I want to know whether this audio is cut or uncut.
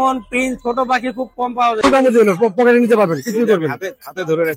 cut